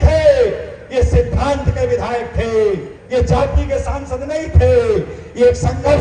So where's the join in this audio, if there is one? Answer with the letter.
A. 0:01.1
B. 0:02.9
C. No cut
B